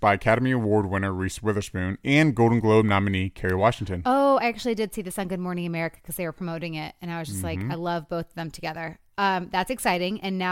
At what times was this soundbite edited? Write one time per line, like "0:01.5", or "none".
none